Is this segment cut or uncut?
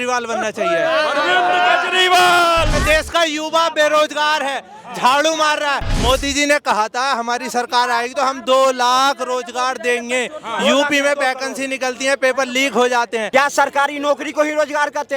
cut